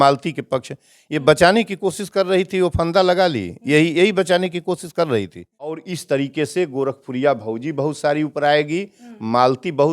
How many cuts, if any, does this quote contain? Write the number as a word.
one